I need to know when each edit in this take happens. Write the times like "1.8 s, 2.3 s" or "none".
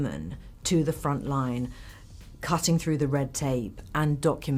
none

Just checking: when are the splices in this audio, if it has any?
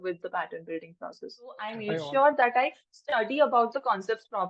1.8 s

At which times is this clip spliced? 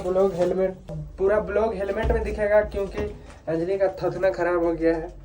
1.0 s

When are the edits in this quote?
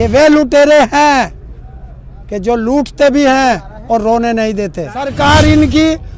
5.1 s

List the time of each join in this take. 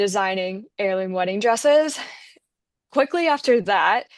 none

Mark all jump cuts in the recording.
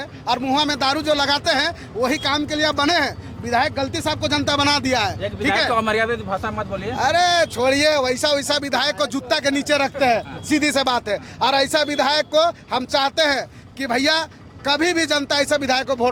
none

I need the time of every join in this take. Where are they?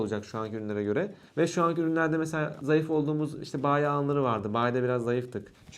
none

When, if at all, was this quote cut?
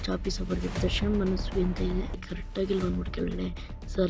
2.2 s

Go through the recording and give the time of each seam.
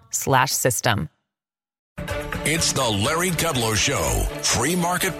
2.0 s

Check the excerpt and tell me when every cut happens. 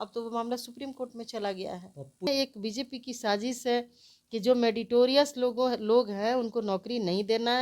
2.3 s

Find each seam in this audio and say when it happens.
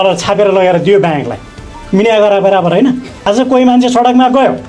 3.1 s

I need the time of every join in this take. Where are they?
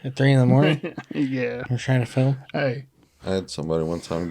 3.1 s

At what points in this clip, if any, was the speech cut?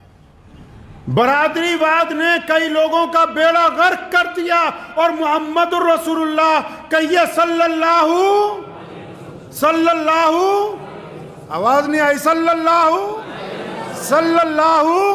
none

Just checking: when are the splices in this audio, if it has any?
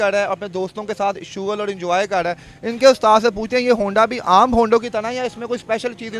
none

